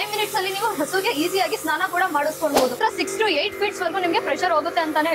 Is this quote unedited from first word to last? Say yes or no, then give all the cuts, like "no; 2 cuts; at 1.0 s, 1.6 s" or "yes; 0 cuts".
no; 1 cut; at 2.8 s